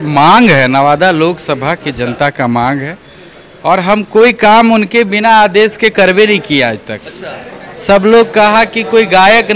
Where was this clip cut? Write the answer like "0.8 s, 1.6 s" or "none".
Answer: none